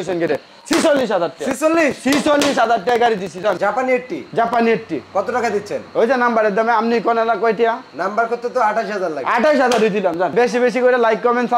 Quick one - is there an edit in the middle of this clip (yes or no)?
yes